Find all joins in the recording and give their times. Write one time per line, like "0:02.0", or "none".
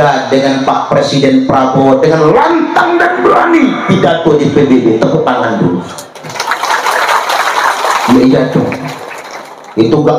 none

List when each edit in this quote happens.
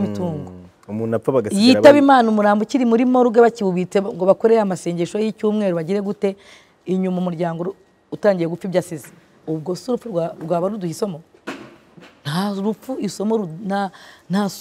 none

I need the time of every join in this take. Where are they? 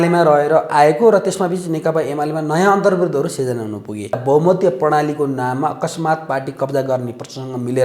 0:04.2

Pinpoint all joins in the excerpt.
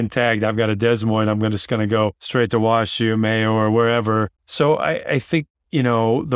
0:02.2
0:04.4

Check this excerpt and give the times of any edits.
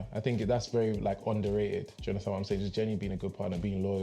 none

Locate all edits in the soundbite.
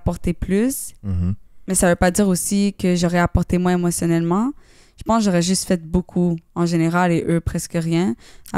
0:01.5

